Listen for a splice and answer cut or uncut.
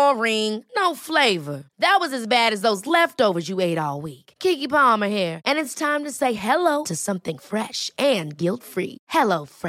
uncut